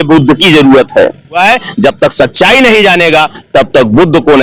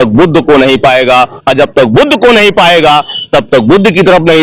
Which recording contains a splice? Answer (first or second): first